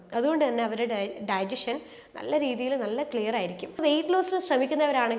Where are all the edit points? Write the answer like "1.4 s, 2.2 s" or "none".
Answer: 3.8 s